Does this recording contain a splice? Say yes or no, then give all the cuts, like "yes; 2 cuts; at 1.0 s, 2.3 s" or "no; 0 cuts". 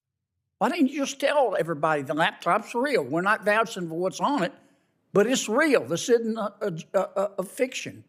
no; 0 cuts